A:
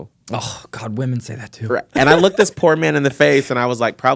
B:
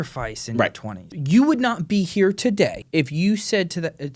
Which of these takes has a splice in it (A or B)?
B